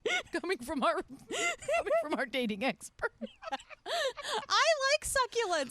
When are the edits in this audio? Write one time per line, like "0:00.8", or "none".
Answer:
0:01.2